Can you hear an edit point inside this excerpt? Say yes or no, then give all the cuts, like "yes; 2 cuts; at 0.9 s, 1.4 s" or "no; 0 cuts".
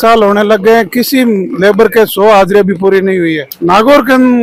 no; 0 cuts